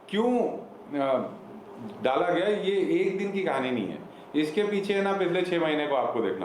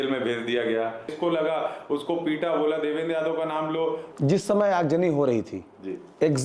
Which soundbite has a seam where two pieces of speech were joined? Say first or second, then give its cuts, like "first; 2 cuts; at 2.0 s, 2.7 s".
second; 2 cuts; at 1.1 s, 4.1 s